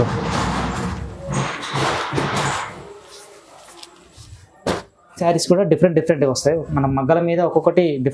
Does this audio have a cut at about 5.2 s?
yes; 1 cut; at 5.2 s

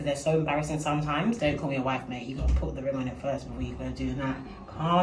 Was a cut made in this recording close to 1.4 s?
yes; 1 cut; at 1.4 s

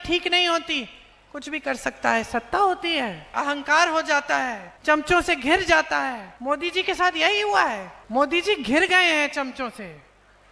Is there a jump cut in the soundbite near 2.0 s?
no; 4 cuts; at 3.3 s, 4.7 s, 6.3 s, 7.9 s

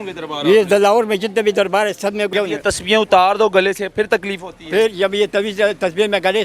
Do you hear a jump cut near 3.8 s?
no; 1 cut; at 2.3 s

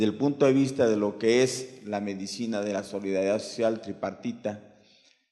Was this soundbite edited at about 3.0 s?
yes; 1 cut; at 3.0 s

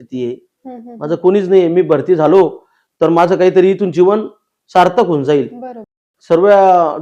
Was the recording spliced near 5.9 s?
yes; 1 cut; at 5.9 s

